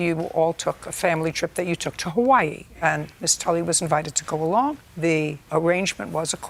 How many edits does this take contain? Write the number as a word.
zero